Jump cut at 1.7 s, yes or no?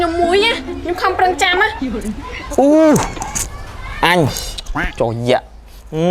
yes